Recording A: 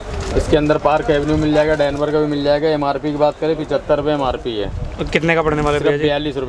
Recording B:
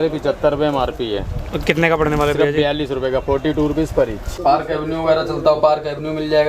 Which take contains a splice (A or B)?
B